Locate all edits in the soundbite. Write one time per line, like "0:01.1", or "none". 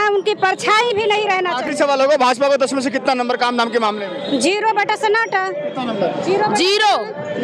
none